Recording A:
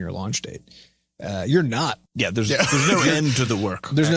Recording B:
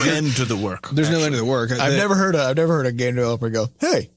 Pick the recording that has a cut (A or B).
A